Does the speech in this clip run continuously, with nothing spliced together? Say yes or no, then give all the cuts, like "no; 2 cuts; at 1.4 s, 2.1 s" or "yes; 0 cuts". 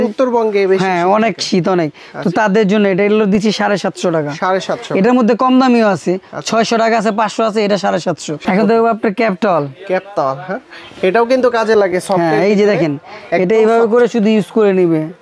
yes; 0 cuts